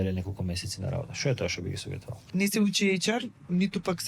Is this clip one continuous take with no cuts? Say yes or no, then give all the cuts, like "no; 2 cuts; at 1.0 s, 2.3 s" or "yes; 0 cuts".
no; 1 cut; at 2.1 s